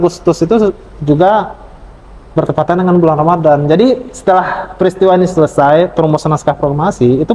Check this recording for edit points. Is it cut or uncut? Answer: uncut